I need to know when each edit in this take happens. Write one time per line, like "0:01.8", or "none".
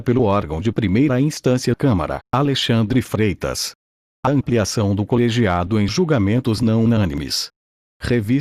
0:01.4